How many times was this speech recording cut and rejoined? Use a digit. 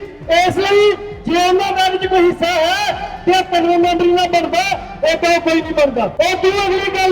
1